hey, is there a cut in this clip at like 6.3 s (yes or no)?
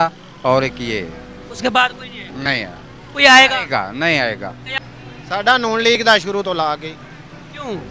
no